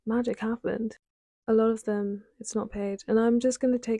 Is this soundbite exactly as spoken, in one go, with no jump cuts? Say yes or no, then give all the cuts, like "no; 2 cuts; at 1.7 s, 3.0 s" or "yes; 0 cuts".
no; 1 cut; at 1.0 s